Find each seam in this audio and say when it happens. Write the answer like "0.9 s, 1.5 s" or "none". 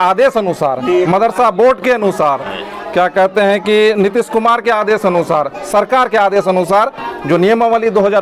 none